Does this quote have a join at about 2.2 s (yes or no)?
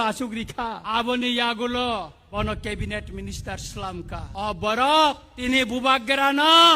yes